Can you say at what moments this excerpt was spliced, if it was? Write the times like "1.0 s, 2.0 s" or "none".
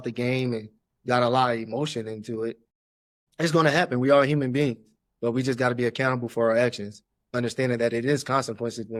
none